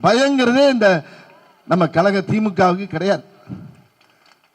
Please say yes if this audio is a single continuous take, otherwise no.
yes